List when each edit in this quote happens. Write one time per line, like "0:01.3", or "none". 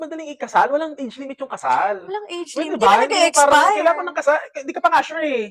none